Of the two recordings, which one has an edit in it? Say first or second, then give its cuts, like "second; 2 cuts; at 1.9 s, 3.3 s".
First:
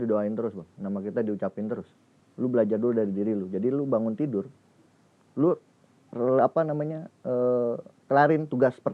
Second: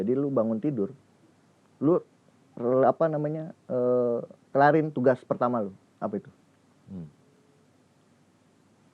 first; 1 cut; at 2.2 s